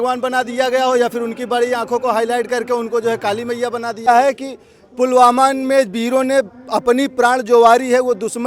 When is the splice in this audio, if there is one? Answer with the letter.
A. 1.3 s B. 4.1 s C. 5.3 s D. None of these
B